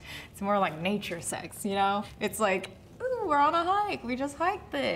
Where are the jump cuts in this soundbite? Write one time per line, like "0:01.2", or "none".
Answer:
none